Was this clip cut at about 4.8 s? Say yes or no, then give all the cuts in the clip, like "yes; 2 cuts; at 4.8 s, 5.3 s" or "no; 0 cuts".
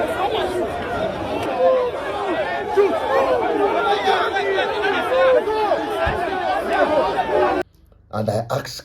no; 2 cuts; at 1.4 s, 7.6 s